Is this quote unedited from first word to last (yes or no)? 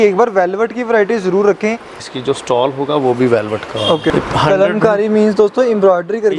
no